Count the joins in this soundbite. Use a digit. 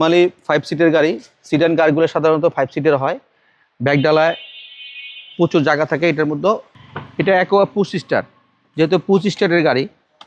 1